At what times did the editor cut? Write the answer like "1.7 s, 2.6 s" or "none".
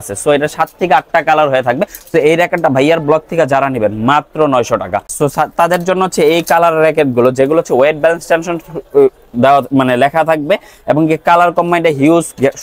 5.1 s